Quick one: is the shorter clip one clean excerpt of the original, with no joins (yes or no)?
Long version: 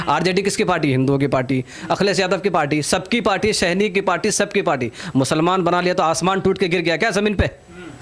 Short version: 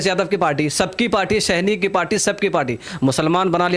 yes